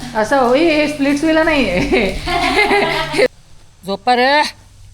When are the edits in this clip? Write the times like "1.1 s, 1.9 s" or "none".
3.3 s